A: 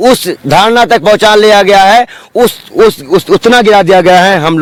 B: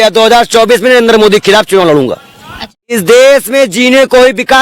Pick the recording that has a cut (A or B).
B